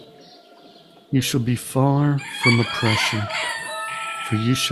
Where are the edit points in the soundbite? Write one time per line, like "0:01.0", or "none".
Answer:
none